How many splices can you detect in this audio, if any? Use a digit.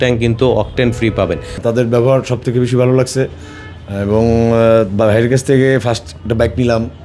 1